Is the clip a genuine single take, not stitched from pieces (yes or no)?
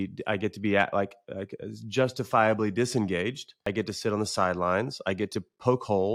no